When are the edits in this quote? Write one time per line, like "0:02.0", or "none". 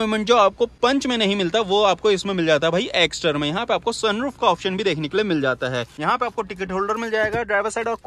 none